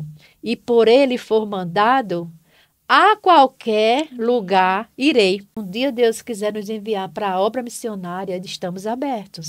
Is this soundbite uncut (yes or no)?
no